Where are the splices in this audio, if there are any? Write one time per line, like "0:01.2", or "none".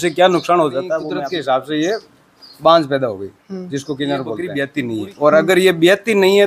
0:01.1
0:04.6